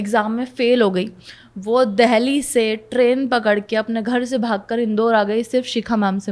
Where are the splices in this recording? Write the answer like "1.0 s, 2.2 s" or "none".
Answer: none